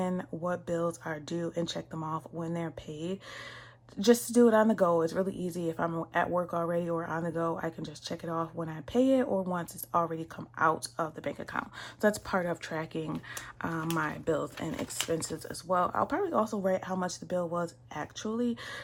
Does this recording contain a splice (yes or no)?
no